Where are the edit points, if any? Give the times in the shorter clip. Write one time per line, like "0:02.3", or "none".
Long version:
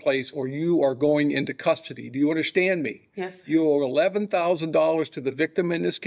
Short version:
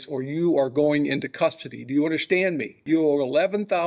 0:02.7